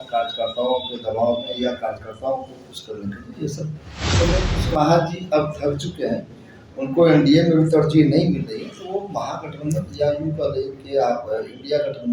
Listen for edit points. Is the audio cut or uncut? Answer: cut